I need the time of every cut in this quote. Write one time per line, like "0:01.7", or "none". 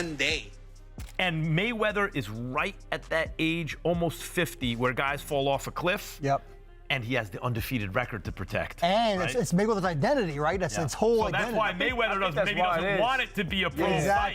0:01.1
0:08.7